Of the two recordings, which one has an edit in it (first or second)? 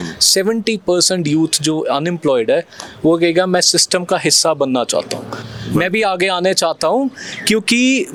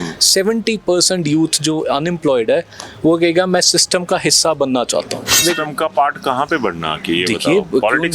second